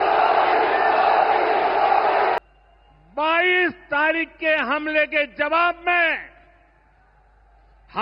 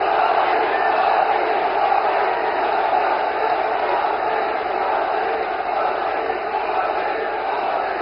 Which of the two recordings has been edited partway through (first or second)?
first